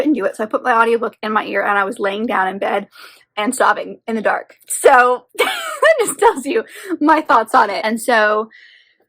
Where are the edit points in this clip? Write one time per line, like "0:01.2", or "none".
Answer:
0:07.8